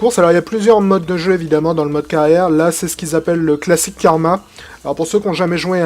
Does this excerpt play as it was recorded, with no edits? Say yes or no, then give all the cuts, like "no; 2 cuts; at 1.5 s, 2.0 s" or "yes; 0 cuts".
no; 1 cut; at 3.2 s